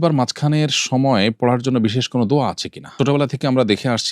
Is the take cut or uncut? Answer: cut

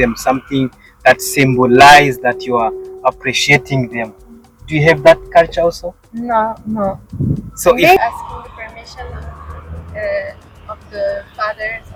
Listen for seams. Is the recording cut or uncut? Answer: uncut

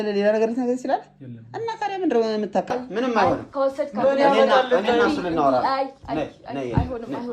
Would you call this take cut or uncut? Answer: cut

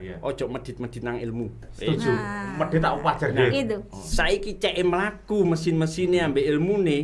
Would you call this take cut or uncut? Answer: uncut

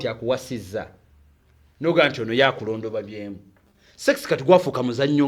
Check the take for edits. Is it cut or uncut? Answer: uncut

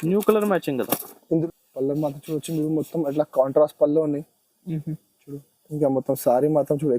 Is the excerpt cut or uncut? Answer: cut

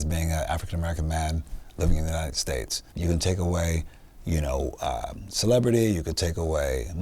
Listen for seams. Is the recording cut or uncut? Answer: cut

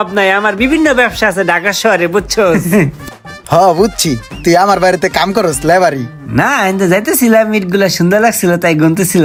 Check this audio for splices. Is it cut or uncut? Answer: uncut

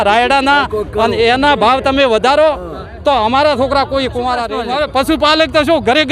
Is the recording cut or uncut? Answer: cut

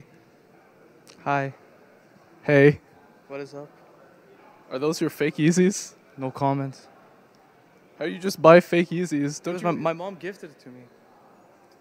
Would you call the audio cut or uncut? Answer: uncut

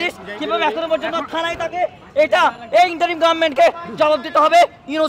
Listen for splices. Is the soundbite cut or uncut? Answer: uncut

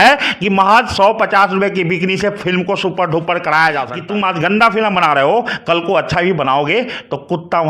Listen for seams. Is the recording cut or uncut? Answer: cut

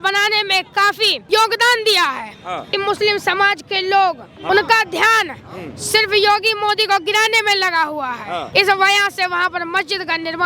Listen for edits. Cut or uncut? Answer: cut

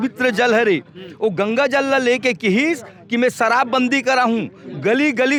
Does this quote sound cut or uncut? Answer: uncut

